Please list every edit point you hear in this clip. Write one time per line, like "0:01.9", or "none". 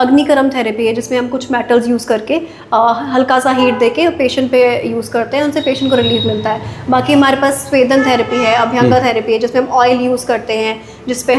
none